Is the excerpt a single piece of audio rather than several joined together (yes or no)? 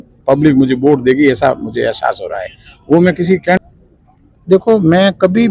no